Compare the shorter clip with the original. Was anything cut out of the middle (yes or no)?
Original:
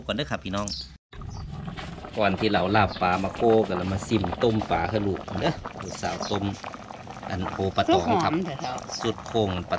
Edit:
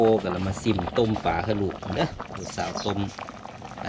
no